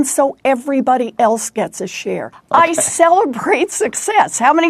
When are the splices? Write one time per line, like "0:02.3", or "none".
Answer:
0:02.3